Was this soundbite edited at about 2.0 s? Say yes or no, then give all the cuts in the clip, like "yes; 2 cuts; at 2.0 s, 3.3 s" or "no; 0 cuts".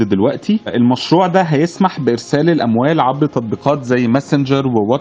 no; 0 cuts